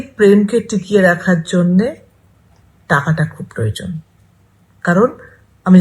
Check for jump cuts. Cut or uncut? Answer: cut